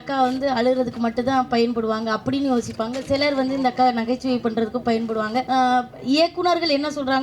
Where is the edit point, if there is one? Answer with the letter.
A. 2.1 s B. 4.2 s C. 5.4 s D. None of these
C